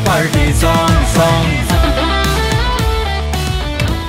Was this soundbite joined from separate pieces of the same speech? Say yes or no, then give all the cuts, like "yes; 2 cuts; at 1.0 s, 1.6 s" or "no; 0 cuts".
no; 0 cuts